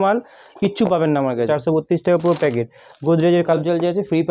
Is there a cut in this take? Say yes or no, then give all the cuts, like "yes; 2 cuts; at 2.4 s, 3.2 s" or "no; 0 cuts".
yes; 2 cuts; at 1.5 s, 3.5 s